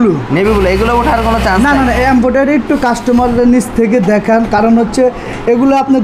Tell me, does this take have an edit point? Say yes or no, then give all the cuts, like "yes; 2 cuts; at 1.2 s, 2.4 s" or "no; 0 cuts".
no; 0 cuts